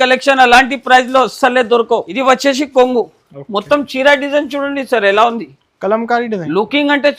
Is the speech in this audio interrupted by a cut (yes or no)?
yes